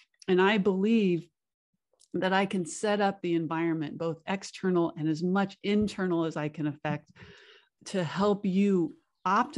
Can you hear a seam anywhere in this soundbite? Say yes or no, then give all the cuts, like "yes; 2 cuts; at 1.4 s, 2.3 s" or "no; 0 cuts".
yes; 1 cut; at 7.6 s